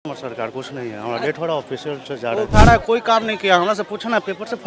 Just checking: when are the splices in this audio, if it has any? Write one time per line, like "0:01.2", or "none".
0:02.5